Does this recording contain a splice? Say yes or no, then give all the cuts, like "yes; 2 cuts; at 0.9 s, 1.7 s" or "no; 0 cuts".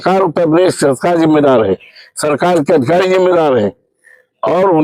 no; 0 cuts